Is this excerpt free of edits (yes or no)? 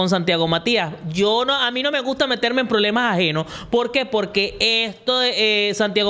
yes